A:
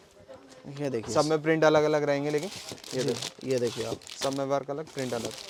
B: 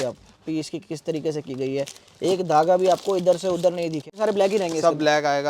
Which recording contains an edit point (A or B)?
B